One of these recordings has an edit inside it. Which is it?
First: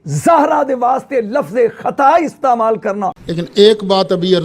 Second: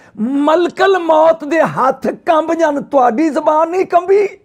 first; 1 cut; at 3.1 s

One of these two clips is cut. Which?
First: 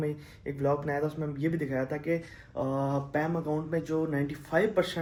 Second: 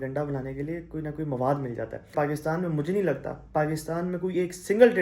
second; 1 cut; at 2.1 s

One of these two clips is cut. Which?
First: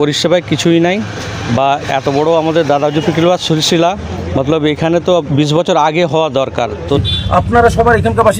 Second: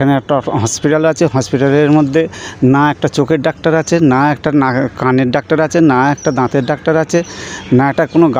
first; 1 cut; at 7.0 s

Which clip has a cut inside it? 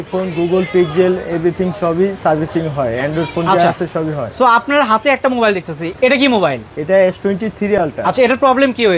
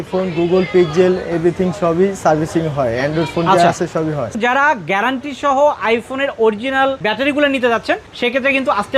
second; 1 cut; at 4.3 s

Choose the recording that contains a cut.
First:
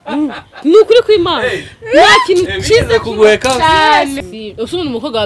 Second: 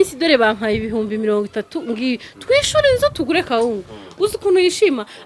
first; 1 cut; at 4.2 s

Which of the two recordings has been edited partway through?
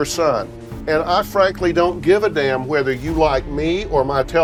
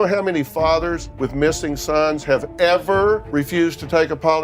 second; 2 cuts; at 1.1 s, 3.3 s

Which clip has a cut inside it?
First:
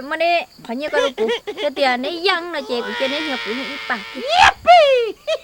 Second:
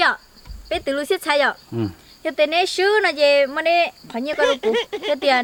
first; 1 cut; at 4.2 s

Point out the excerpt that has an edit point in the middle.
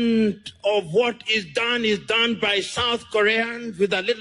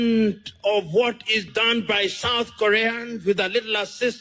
second; 1 cut; at 1.5 s

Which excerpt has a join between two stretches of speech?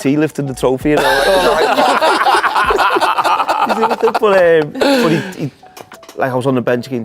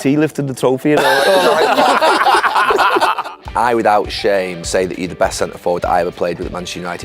second; 2 cuts; at 3.4 s, 4.6 s

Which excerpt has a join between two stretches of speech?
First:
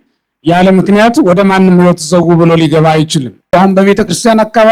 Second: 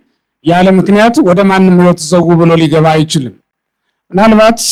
first; 1 cut; at 3.4 s

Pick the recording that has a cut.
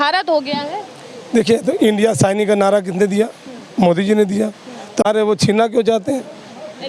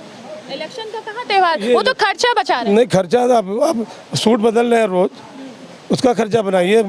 first; 1 cut; at 5.1 s

